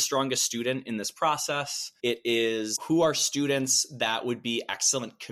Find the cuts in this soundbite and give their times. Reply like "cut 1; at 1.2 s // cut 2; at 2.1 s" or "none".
none